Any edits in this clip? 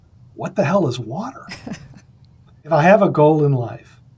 no; 0 cuts

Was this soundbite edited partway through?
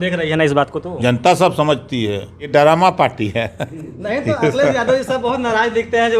yes; 1 cut; at 2.5 s

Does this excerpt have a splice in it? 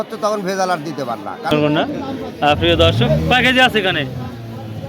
yes; 1 cut; at 1.5 s

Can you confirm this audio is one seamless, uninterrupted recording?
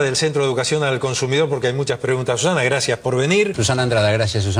no; 1 cut; at 3.6 s

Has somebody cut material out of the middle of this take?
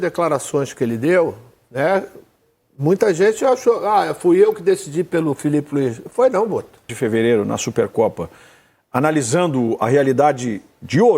yes; 1 cut; at 7.0 s

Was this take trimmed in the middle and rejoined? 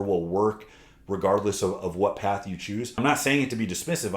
yes; 1 cut; at 2.9 s

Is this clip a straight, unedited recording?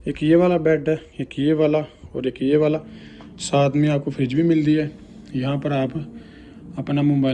yes; 0 cuts

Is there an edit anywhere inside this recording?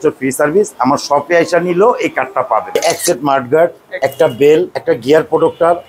yes; 3 cuts; at 2.8 s, 3.9 s, 4.7 s

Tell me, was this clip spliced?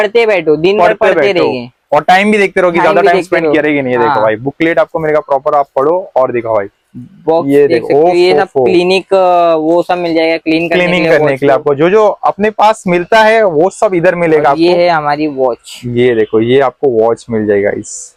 no; 0 cuts

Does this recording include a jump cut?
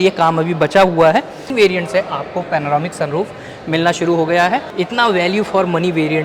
yes; 2 cuts; at 1.4 s, 4.7 s

